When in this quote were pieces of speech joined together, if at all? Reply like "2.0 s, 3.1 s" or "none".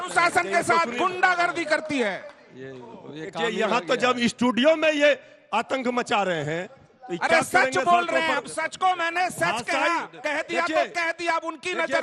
none